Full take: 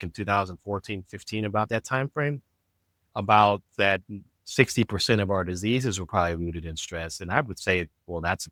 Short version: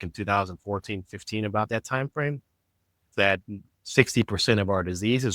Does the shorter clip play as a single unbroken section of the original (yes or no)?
no